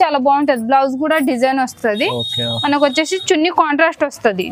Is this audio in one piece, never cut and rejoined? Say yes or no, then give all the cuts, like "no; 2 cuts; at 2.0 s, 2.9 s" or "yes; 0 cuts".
yes; 0 cuts